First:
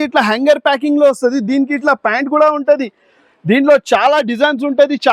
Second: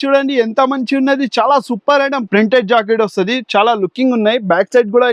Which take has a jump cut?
second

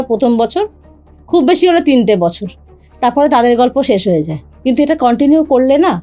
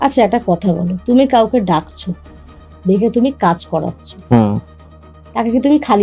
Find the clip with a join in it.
first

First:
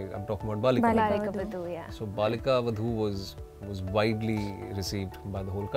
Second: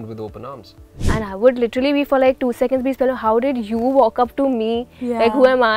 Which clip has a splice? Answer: second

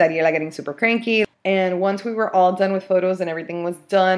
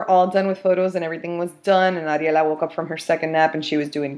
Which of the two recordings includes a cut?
first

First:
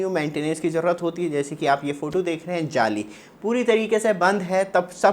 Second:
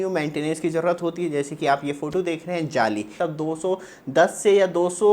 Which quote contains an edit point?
second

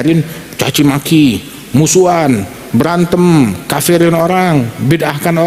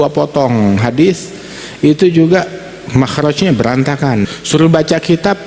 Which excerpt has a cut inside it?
second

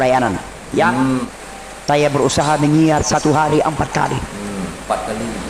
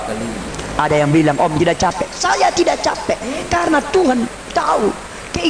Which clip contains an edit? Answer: first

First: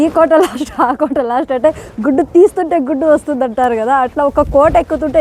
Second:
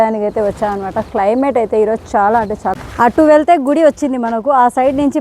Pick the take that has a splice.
second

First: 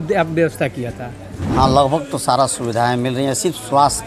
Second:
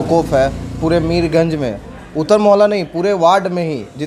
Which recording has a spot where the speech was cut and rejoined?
first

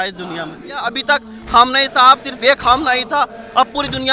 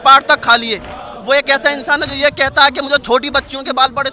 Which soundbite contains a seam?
first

